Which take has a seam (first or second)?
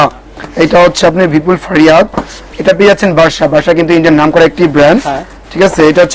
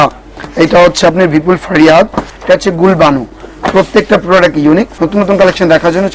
second